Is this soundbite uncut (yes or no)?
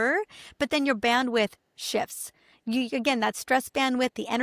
yes